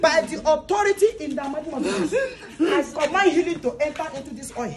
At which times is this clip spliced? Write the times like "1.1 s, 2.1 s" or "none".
none